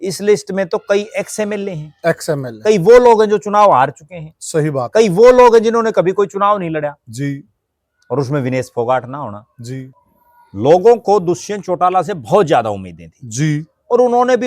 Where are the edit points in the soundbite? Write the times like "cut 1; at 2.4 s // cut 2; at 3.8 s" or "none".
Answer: cut 1; at 10.0 s